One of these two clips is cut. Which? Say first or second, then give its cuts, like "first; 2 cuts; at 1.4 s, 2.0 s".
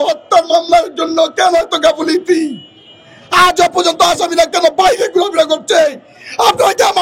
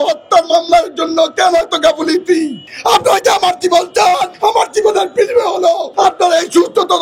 second; 3 cuts; at 2.6 s, 4.3 s, 5.9 s